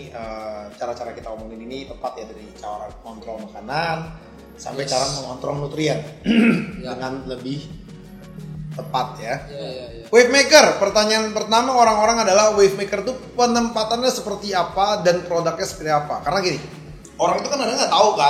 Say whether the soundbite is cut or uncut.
cut